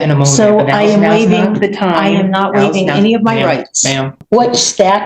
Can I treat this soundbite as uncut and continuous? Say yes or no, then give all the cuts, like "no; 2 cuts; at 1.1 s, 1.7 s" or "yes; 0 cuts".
no; 1 cut; at 4.1 s